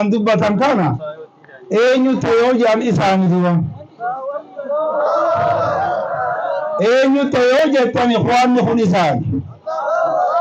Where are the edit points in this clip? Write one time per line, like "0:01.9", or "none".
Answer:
none